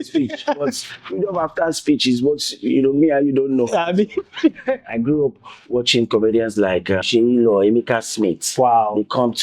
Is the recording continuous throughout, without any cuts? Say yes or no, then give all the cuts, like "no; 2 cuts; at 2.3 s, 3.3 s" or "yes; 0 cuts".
no; 2 cuts; at 4.9 s, 7.0 s